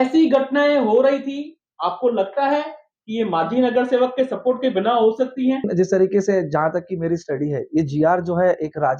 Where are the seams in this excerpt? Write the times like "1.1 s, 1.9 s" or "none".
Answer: 5.7 s